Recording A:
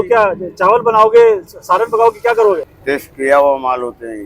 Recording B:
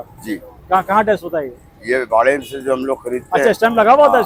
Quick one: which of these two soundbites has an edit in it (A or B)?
A